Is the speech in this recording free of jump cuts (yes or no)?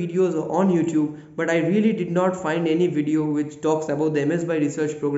yes